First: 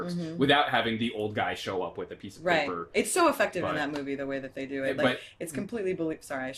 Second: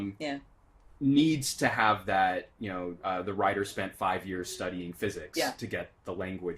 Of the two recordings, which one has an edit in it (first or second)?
second